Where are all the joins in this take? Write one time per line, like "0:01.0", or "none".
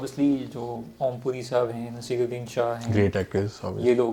none